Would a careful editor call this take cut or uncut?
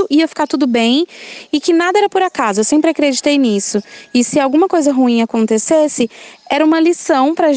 uncut